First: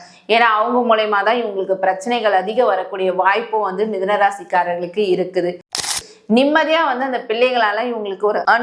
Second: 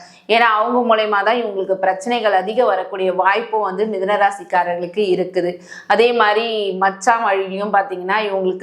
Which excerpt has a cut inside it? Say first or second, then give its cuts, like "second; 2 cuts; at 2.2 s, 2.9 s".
first; 1 cut; at 5.9 s